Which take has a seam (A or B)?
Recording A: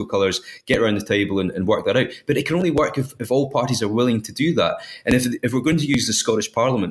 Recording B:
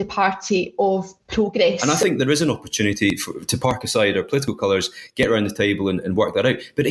B